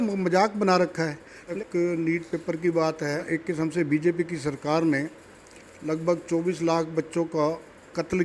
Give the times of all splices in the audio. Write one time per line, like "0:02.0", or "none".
0:01.4
0:03.2